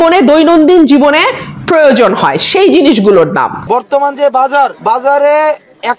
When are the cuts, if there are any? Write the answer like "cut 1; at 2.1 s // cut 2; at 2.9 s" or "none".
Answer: cut 1; at 3.6 s // cut 2; at 4.8 s